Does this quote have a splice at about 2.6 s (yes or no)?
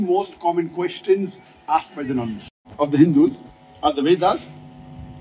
yes